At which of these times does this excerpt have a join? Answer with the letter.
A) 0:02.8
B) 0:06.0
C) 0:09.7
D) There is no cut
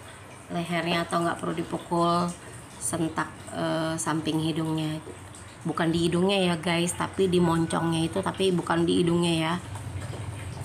C